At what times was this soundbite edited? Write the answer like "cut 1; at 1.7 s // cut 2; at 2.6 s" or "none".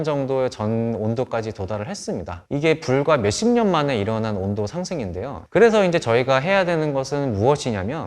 cut 1; at 5.4 s

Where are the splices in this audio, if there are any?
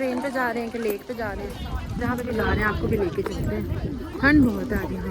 none

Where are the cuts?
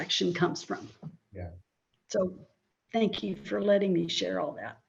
none

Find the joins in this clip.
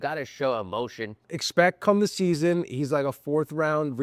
cut 1; at 1.3 s

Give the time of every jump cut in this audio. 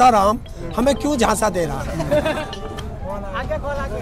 cut 1; at 2.4 s

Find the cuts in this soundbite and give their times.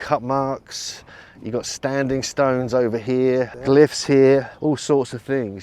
cut 1; at 3.6 s // cut 2; at 4.5 s

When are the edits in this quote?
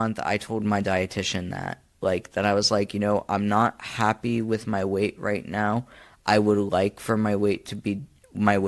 none

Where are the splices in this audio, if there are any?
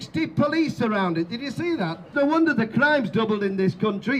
cut 1; at 2.1 s

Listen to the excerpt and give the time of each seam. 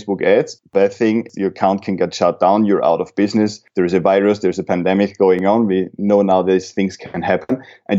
cut 1; at 1.5 s

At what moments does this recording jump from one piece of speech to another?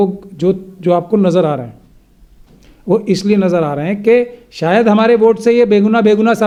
none

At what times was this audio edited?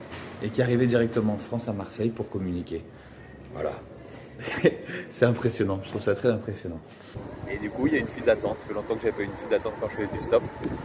cut 1; at 7.2 s

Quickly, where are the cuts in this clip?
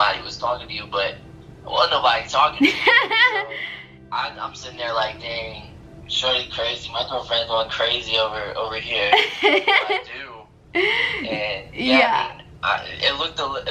none

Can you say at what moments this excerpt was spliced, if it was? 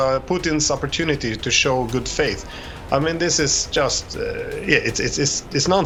none

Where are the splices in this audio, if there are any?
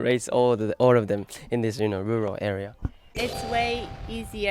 cut 1; at 3.1 s

